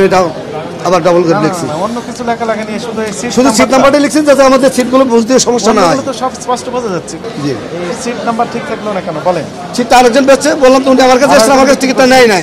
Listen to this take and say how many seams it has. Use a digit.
1